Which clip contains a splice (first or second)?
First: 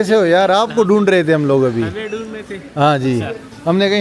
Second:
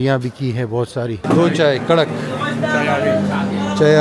second